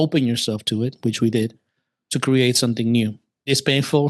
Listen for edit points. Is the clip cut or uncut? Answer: uncut